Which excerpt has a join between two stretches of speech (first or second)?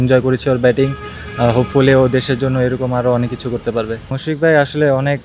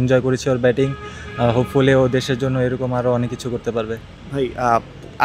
first